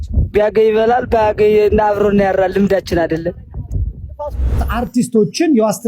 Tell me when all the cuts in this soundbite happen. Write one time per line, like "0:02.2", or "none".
0:04.6